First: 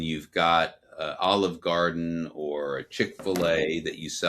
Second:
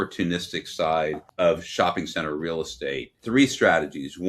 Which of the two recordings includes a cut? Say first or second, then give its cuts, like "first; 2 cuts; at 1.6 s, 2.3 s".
second; 2 cuts; at 1.2 s, 3.1 s